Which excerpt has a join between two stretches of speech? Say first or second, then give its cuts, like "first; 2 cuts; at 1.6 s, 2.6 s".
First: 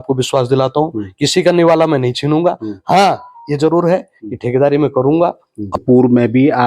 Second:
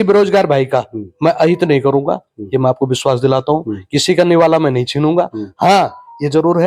first; 1 cut; at 5.5 s